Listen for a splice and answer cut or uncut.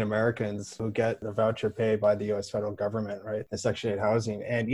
cut